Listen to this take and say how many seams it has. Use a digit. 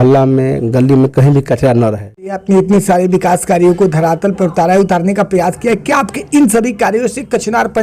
1